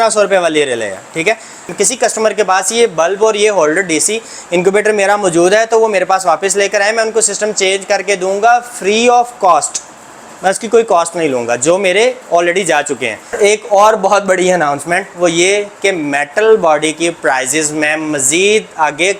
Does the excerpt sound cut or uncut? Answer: cut